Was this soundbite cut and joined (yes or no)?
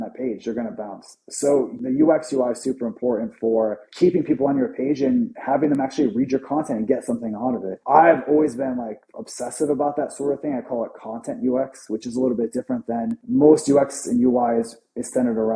yes